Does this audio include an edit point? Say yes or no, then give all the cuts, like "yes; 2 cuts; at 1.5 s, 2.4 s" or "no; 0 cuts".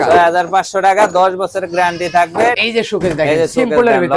yes; 1 cut; at 2.6 s